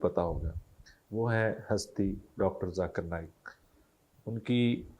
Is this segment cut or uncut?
uncut